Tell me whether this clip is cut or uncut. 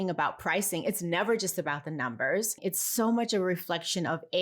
cut